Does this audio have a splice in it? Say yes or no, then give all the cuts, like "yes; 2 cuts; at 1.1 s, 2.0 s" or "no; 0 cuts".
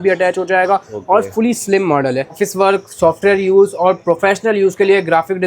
yes; 1 cut; at 2.4 s